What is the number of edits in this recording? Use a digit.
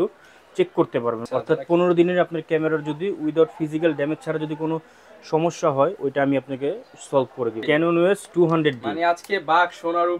2